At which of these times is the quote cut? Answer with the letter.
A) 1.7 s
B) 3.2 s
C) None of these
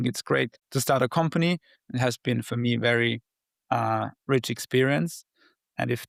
C